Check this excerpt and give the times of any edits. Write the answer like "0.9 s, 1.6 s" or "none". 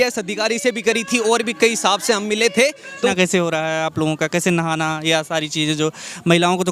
3.1 s